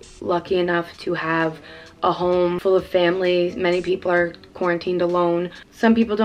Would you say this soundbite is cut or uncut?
cut